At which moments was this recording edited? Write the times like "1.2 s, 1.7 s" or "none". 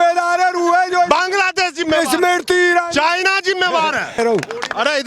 4.2 s